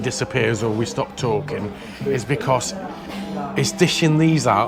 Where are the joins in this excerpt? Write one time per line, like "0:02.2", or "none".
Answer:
none